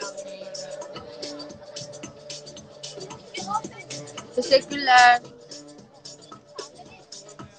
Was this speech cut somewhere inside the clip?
yes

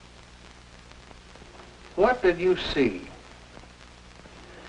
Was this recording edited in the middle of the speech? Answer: yes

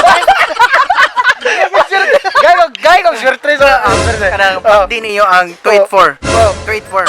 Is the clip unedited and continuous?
yes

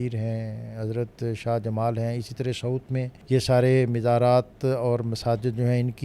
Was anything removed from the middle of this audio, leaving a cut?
yes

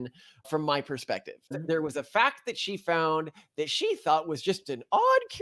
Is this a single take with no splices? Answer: no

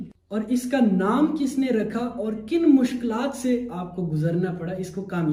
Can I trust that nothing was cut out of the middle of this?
yes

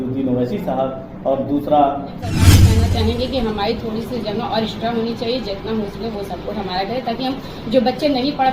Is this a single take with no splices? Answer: no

